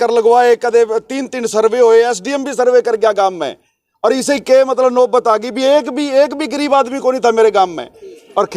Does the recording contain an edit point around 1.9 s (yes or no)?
no